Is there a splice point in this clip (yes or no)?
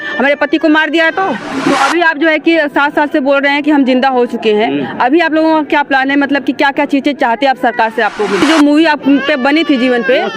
yes